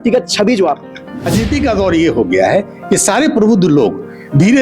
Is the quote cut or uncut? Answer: cut